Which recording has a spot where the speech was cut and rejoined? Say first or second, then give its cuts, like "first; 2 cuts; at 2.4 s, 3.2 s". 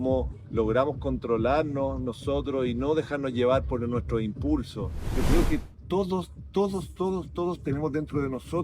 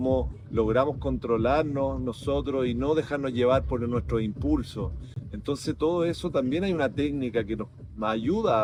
first; 1 cut; at 5.2 s